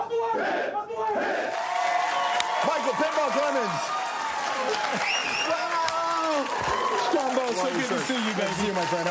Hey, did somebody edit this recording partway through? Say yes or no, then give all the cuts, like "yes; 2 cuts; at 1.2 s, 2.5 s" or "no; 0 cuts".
yes; 1 cut; at 7.0 s